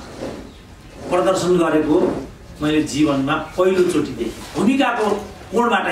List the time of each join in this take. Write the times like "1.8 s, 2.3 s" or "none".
4.5 s